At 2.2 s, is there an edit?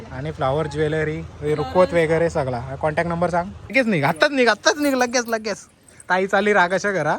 no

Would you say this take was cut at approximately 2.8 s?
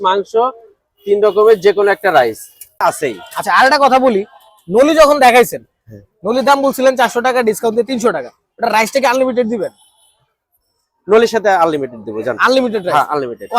yes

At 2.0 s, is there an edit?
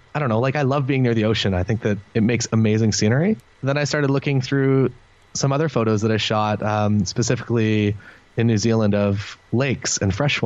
yes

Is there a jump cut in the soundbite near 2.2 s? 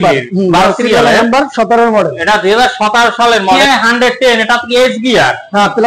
no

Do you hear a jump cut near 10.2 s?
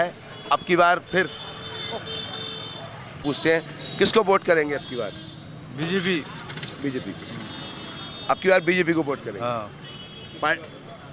no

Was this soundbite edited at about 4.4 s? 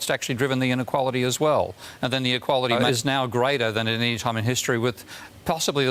no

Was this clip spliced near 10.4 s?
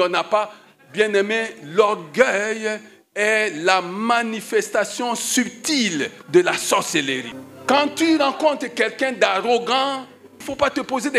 yes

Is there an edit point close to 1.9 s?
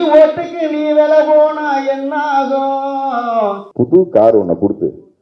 no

